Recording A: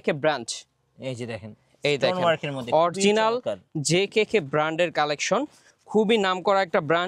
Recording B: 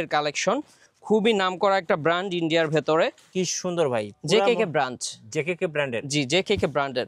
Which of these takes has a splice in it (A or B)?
B